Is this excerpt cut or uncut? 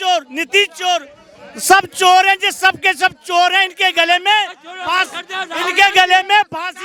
uncut